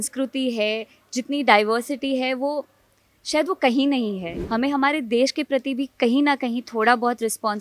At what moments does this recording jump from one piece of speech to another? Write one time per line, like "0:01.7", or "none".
0:04.3